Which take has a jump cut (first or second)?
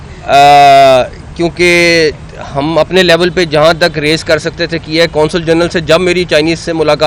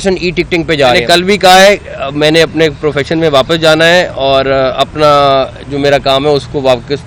second